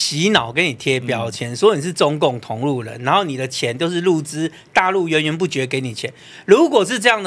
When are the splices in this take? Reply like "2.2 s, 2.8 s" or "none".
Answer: none